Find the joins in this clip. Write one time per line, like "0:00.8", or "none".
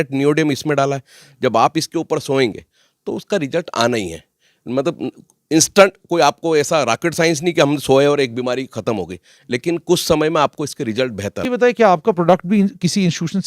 0:11.4